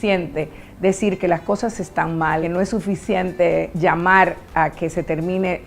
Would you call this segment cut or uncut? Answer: cut